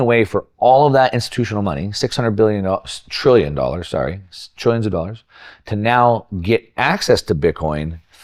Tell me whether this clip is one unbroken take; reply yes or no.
yes